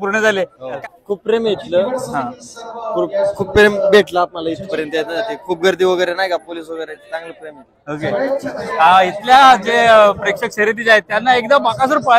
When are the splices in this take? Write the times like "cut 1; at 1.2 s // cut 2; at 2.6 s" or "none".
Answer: cut 1; at 0.8 s // cut 2; at 8.6 s

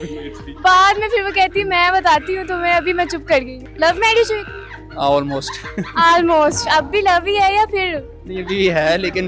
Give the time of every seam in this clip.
cut 1; at 3.6 s

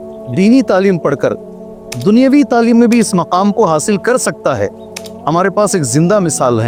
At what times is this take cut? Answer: none

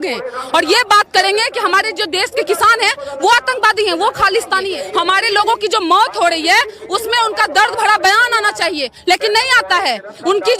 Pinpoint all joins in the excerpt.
cut 1; at 4.8 s

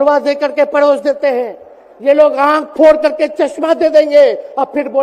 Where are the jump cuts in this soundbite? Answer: none

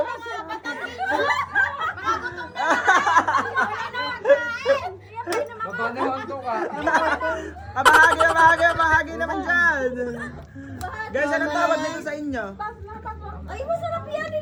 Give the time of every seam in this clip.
none

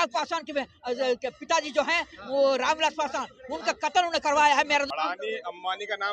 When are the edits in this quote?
cut 1; at 4.9 s

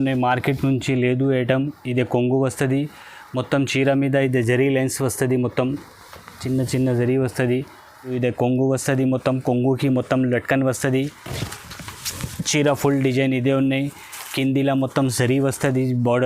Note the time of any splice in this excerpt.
cut 1; at 8.1 s

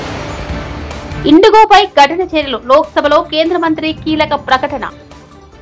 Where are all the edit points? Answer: none

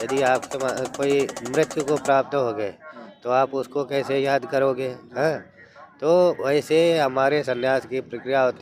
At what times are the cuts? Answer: none

